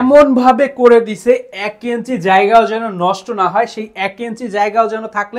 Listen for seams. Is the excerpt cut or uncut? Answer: uncut